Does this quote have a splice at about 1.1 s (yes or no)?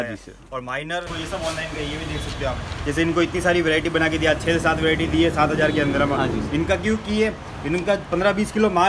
yes